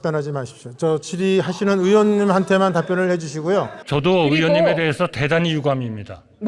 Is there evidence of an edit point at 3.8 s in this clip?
yes; 1 cut; at 3.8 s

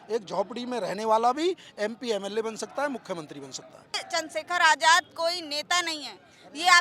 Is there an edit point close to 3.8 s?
yes; 1 cut; at 3.8 s

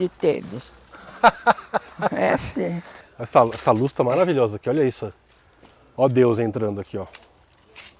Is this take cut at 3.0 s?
yes; 1 cut; at 3.0 s

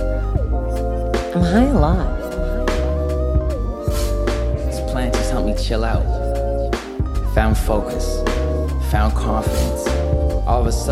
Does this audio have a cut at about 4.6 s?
yes; 1 cut; at 4.6 s

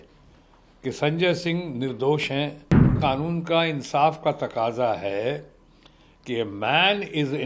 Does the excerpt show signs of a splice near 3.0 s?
yes; 1 cut; at 3.0 s

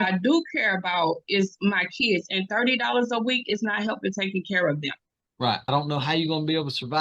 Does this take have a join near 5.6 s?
yes; 1 cut; at 5.6 s

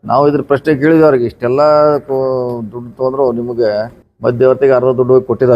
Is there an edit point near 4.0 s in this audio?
yes; 1 cut; at 4.0 s

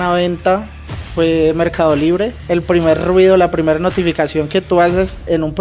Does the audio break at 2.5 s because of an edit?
yes; 1 cut; at 2.5 s

